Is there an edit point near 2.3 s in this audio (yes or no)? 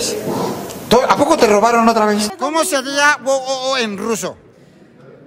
yes